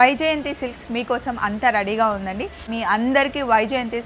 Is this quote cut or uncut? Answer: cut